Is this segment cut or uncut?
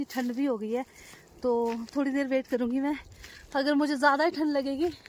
uncut